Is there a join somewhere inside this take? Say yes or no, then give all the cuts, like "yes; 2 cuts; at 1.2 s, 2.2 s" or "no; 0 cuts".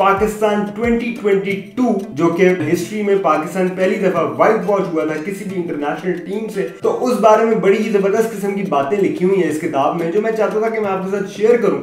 no; 0 cuts